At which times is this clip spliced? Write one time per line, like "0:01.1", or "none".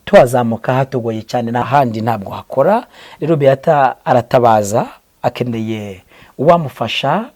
0:01.6